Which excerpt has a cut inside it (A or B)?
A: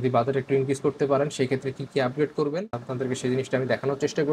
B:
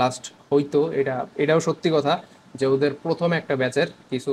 A